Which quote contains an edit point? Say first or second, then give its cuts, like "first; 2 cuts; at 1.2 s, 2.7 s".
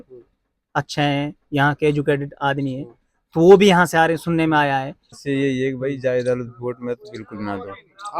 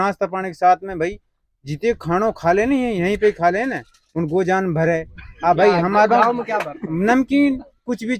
first; 1 cut; at 5.2 s